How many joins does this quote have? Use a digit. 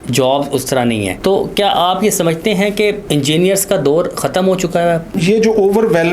3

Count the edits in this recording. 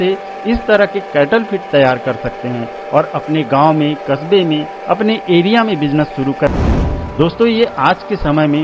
1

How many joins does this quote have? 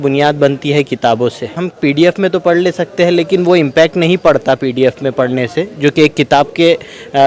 1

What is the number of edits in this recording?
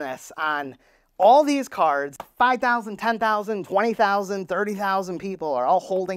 0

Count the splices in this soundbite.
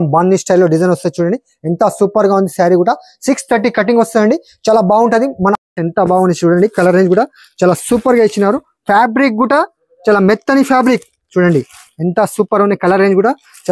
1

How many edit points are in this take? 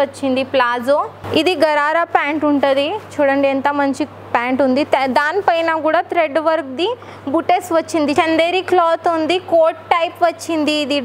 2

